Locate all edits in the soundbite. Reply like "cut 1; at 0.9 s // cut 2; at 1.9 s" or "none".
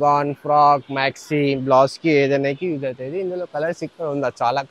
none